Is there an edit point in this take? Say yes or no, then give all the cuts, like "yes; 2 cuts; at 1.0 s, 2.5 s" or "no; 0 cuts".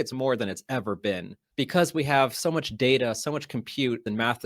yes; 1 cut; at 1.4 s